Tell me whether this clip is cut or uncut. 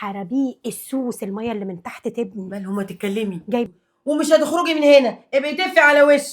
cut